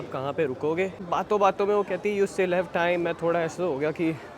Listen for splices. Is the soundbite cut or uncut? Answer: cut